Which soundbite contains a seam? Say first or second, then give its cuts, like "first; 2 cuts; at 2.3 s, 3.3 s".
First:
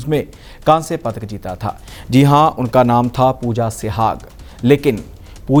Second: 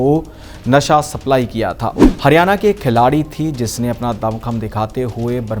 second; 1 cut; at 2.0 s